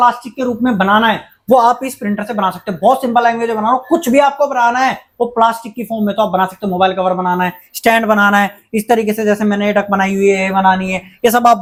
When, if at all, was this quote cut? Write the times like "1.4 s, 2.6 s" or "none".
none